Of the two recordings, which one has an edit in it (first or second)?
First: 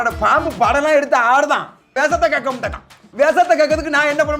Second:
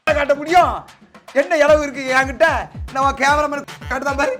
first